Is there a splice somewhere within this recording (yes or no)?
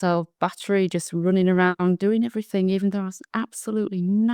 no